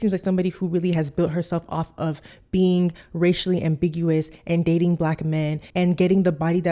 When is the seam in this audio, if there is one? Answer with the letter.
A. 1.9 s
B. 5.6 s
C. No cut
B